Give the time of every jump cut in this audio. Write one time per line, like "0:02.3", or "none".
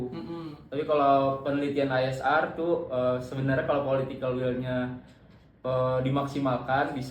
none